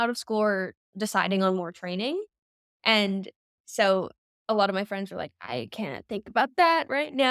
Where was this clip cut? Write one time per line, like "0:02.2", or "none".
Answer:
none